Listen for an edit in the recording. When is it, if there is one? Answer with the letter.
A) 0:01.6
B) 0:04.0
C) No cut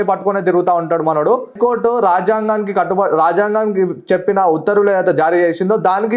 A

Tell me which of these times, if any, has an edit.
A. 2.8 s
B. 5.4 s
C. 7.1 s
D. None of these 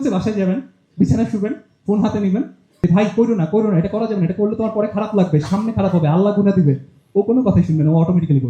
A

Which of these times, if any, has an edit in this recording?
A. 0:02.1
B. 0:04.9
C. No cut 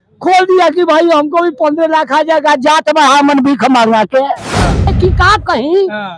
B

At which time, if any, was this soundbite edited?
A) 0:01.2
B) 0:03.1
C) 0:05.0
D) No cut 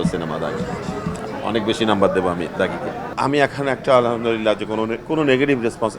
B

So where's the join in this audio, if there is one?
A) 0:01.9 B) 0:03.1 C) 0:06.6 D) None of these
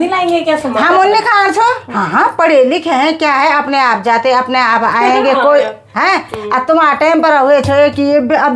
A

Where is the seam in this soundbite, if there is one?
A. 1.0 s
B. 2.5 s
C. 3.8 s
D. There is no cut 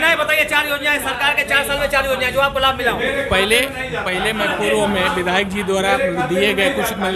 D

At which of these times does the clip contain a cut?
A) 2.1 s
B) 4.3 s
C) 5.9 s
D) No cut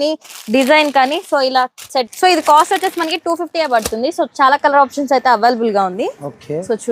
A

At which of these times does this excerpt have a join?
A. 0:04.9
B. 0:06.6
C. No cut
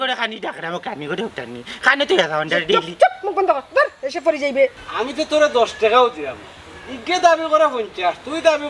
A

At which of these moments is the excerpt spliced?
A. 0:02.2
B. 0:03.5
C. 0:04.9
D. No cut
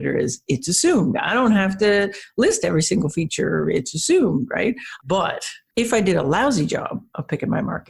C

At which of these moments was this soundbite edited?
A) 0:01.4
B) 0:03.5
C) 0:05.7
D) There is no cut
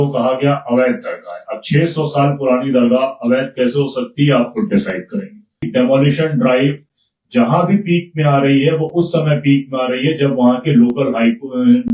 C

